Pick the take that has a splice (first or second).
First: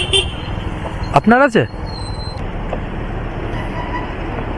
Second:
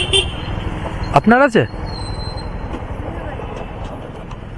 first